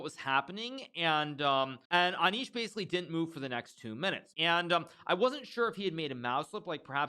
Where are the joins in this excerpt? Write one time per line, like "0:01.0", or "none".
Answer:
0:01.8
0:04.3